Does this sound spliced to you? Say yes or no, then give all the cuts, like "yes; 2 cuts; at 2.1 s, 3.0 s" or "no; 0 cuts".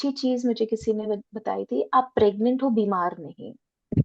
no; 0 cuts